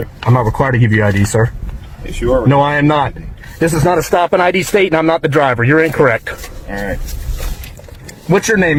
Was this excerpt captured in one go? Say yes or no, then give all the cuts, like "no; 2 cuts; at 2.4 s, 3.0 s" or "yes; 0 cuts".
yes; 0 cuts